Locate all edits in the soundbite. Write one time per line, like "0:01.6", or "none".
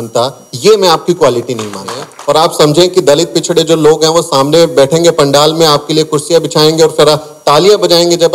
0:02.1